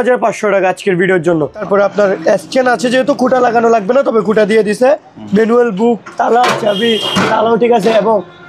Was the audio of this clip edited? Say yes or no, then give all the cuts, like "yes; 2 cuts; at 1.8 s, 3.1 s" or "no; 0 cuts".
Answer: yes; 1 cut; at 1.7 s